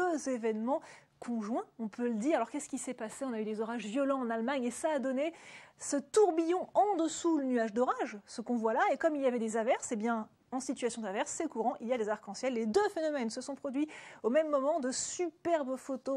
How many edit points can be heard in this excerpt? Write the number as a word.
zero